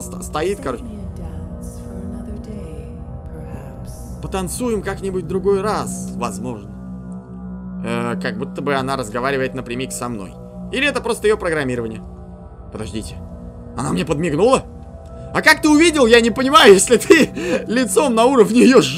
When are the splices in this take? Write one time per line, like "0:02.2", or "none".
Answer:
none